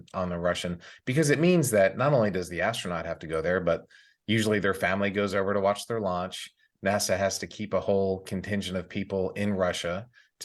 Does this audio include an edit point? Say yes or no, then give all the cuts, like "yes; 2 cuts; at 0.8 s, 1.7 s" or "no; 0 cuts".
no; 0 cuts